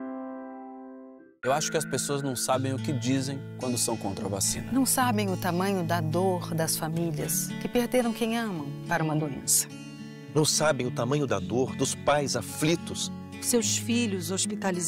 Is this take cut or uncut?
cut